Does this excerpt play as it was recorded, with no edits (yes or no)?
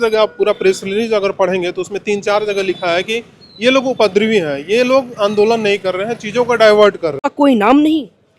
no